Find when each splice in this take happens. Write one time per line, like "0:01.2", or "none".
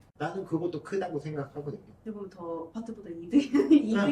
0:01.9
0:02.7